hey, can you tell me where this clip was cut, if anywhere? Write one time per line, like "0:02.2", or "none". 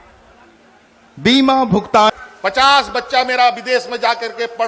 0:02.0